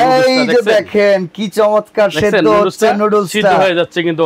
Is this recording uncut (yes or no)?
yes